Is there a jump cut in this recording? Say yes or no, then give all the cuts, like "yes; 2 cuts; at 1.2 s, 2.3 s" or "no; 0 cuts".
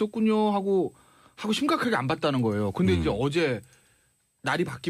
yes; 1 cut; at 1.8 s